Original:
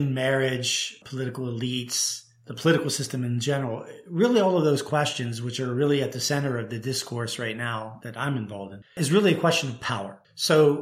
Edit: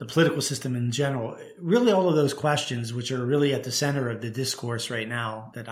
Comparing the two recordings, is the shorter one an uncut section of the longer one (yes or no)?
yes